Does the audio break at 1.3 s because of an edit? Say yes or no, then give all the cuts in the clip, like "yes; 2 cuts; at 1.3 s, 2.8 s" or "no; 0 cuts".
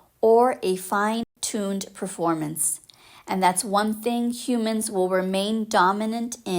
yes; 1 cut; at 1.3 s